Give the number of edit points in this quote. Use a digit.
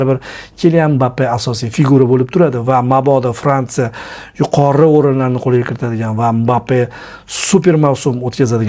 0